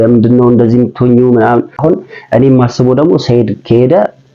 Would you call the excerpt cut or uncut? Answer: cut